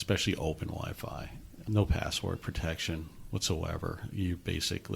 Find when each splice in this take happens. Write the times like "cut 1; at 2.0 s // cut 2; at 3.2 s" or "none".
cut 1; at 1.6 s

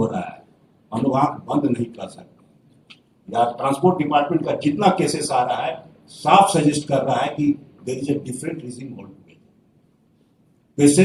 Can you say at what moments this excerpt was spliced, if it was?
none

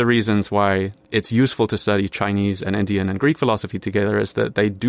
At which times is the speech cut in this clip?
cut 1; at 1.0 s

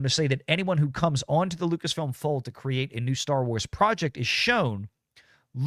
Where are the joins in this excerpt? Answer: none

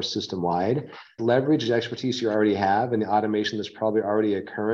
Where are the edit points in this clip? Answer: cut 1; at 1.2 s

